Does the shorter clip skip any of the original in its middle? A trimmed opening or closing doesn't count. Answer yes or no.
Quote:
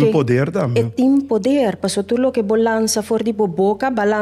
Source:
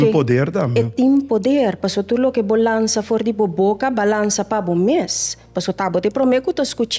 no